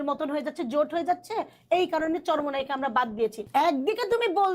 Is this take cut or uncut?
cut